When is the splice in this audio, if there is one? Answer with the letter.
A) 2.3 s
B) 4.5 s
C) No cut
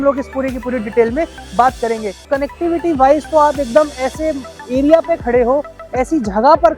A